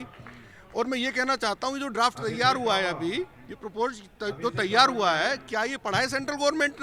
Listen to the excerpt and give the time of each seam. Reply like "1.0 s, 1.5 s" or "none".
none